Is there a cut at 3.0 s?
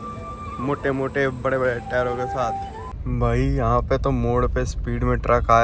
yes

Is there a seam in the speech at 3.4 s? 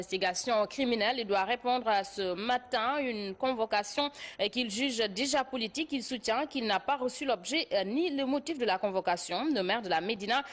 yes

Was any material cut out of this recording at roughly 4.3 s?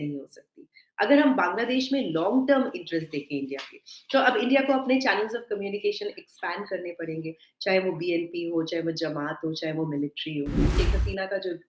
no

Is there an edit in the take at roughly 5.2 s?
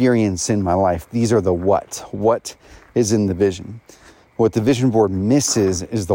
no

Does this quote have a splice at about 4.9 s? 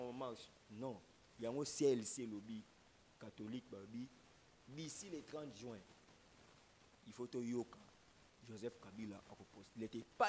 no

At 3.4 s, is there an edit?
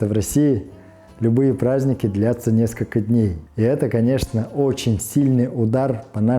yes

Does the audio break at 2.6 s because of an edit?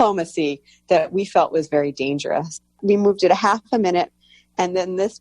yes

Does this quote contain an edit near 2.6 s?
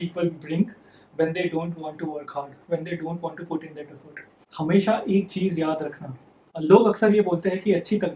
no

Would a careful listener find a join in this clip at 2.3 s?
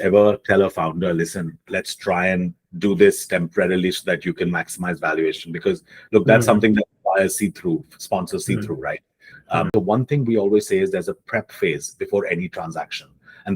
no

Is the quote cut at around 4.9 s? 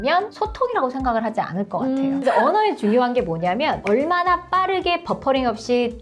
no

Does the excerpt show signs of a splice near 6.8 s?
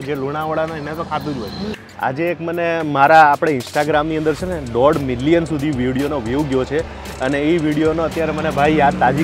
no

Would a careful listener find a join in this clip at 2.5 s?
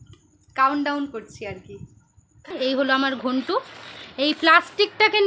yes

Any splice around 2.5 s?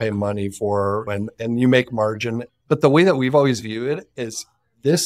yes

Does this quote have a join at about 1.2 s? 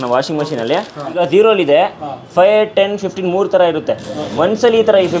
yes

